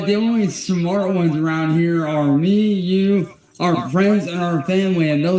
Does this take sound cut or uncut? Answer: uncut